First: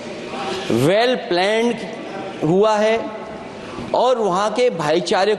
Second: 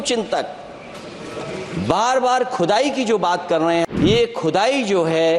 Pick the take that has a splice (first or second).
second